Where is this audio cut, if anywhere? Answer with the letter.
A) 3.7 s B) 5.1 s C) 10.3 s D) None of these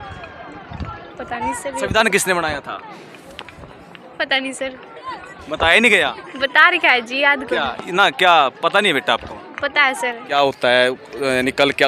C